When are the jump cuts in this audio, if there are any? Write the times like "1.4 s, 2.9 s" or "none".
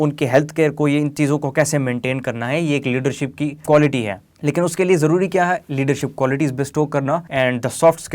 3.6 s, 4.2 s, 7.3 s